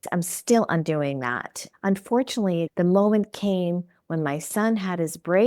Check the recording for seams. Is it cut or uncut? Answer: cut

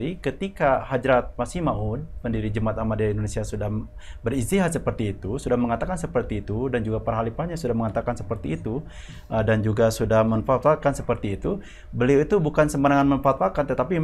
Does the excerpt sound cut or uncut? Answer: uncut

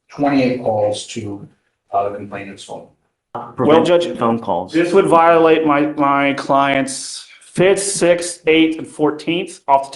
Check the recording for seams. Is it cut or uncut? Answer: cut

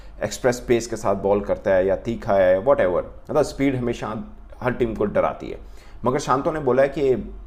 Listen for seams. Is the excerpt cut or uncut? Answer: uncut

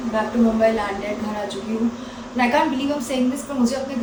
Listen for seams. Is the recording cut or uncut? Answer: uncut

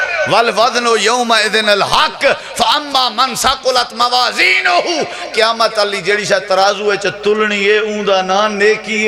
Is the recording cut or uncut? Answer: uncut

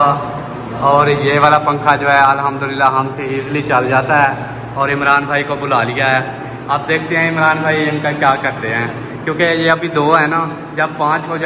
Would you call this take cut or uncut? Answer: uncut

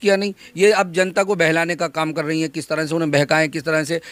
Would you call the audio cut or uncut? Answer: uncut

